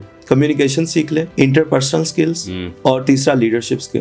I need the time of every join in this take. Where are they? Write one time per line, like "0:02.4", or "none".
none

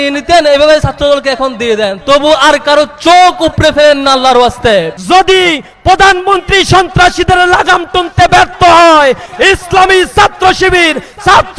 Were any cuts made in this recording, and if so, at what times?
0:05.0

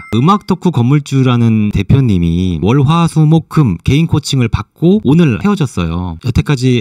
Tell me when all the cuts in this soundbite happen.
none

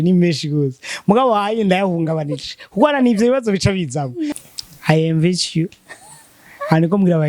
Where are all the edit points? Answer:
0:04.3

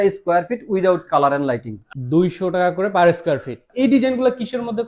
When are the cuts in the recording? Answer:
none

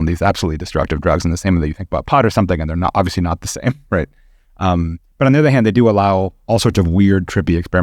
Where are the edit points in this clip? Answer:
none

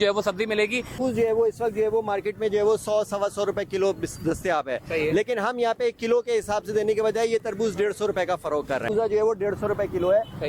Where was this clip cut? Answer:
0:01.0
0:08.9

